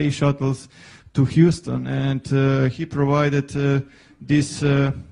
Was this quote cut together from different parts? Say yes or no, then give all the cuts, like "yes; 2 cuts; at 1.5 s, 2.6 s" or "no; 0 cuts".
yes; 1 cut; at 2.1 s